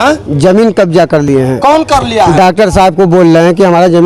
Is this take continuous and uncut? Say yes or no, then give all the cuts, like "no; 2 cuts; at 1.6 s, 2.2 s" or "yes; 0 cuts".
yes; 0 cuts